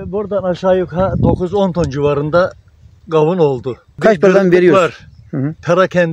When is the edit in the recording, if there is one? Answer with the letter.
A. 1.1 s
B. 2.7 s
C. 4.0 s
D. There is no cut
C